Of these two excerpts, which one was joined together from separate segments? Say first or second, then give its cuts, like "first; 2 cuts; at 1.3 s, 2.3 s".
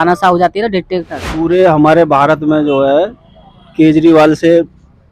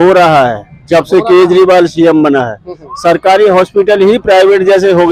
first; 1 cut; at 1.2 s